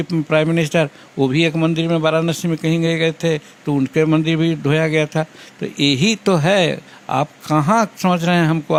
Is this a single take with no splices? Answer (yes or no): yes